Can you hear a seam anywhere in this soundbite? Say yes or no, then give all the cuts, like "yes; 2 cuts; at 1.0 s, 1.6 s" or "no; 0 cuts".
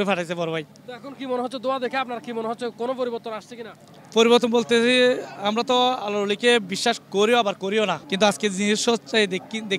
yes; 1 cut; at 8.1 s